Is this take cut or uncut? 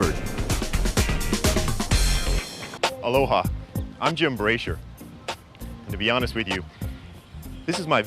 cut